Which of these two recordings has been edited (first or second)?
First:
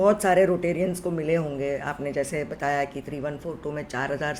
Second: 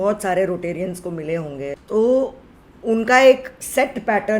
second